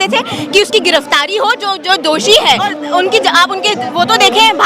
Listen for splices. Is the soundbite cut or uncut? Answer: cut